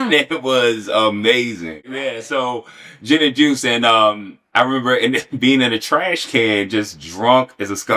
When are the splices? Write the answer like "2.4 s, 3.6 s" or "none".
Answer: 1.8 s